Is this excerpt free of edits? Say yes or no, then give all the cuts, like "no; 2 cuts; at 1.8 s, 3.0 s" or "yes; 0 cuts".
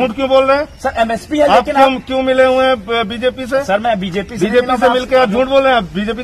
yes; 0 cuts